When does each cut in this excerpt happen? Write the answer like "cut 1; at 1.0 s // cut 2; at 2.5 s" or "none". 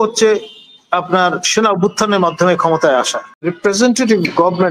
cut 1; at 3.5 s